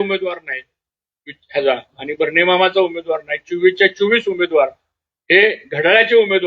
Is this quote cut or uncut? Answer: uncut